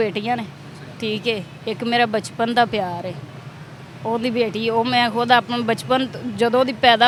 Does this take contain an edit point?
no; 0 cuts

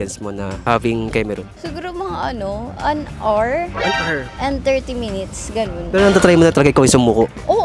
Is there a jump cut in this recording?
no; 0 cuts

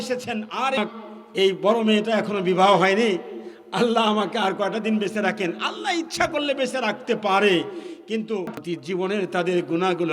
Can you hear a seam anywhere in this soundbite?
yes; 2 cuts; at 0.8 s, 8.7 s

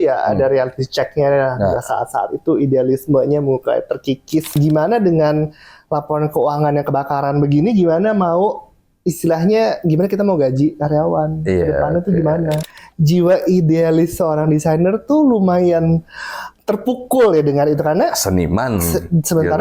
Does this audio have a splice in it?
yes; 2 cuts; at 4.6 s, 12.6 s

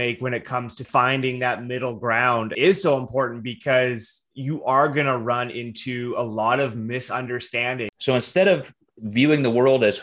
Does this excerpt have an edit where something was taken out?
yes; 3 cuts; at 0.8 s, 2.5 s, 7.9 s

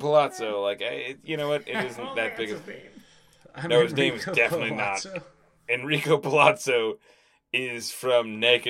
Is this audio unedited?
yes; 0 cuts

